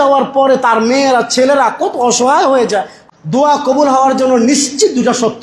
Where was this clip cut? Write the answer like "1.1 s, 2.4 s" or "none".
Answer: 3.0 s